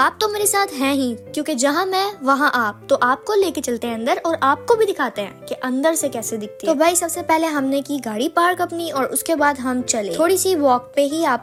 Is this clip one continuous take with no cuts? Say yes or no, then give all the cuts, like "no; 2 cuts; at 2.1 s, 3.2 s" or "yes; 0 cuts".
yes; 0 cuts